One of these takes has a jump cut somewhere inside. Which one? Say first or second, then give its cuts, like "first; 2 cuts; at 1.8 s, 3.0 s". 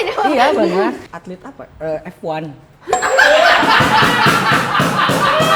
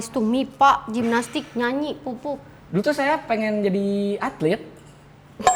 first; 1 cut; at 1.1 s